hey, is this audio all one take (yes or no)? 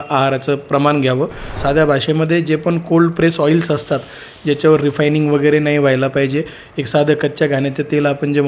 no